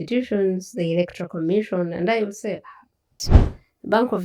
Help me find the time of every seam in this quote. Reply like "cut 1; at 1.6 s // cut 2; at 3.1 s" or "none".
cut 1; at 3.3 s